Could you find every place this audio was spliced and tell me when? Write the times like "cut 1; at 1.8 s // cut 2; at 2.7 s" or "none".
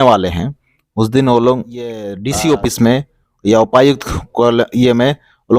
cut 1; at 2.1 s

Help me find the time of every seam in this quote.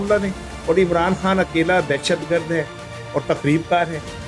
none

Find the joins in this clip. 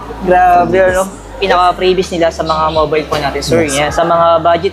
cut 1; at 1.2 s

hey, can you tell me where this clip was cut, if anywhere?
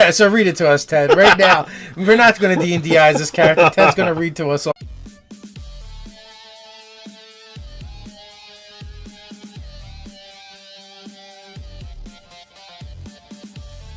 none

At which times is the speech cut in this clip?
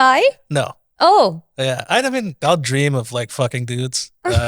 cut 1; at 2.4 s

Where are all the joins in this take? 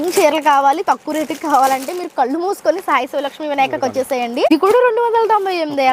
cut 1; at 4.5 s

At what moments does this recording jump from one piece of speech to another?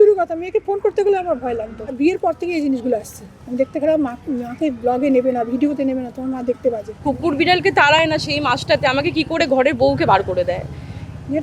cut 1; at 1.8 s // cut 2; at 7.0 s

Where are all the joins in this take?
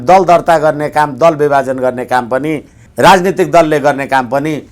cut 1; at 2.9 s

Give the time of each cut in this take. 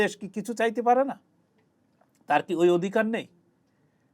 none

